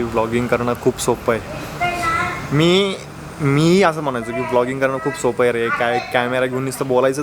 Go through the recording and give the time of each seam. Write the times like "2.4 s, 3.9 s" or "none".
none